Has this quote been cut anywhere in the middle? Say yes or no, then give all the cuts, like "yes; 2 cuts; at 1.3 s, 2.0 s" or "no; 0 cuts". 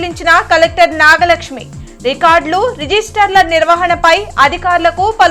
no; 0 cuts